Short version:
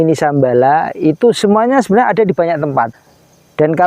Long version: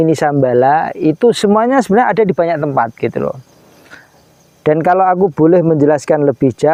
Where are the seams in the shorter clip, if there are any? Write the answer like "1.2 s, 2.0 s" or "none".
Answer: 2.9 s